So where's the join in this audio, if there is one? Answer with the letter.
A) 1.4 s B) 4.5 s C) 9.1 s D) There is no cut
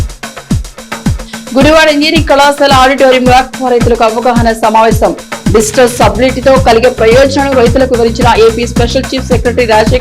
A